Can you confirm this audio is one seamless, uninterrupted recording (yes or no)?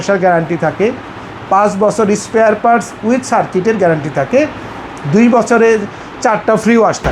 yes